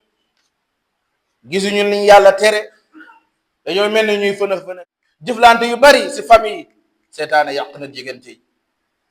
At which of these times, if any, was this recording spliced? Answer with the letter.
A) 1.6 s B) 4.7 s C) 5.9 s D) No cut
B